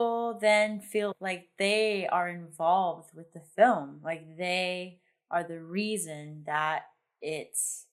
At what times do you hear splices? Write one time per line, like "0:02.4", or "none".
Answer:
0:01.1